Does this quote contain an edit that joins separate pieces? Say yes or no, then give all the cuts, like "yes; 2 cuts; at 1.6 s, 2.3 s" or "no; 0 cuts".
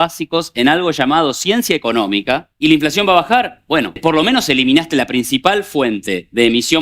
yes; 2 cuts; at 2.5 s, 4.0 s